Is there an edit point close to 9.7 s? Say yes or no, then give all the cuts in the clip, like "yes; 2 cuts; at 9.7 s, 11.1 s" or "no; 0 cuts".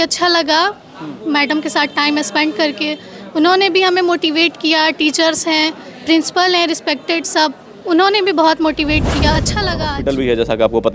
yes; 1 cut; at 9.7 s